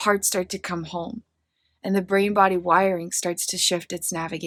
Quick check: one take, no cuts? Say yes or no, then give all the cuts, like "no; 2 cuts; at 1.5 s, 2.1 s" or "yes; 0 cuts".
yes; 0 cuts